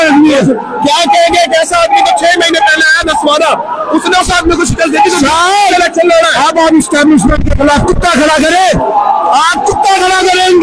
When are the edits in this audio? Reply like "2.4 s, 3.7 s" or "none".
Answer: none